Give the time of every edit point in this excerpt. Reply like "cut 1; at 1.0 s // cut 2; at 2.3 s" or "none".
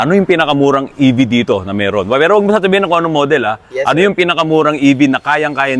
none